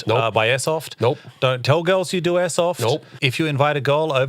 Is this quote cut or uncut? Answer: cut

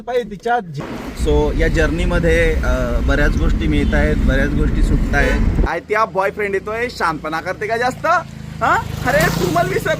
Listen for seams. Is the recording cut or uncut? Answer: cut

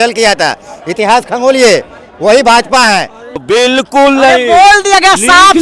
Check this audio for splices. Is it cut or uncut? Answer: cut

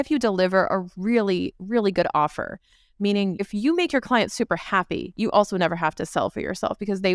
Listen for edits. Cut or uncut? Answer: cut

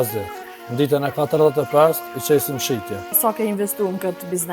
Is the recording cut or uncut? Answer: cut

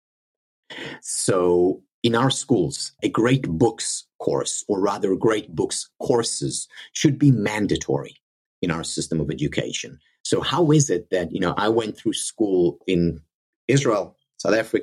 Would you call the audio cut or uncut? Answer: cut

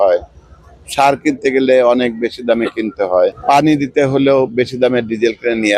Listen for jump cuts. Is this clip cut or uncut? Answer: uncut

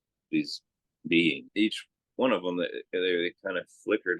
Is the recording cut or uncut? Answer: cut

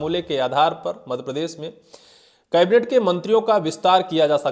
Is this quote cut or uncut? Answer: uncut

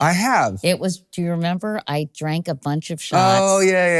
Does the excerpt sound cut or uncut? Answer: uncut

